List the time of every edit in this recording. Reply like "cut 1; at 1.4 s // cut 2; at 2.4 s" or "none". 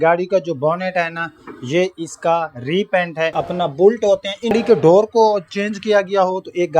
cut 1; at 3.4 s // cut 2; at 4.5 s